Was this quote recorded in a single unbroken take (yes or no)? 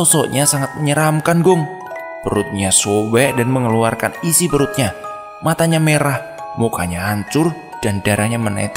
no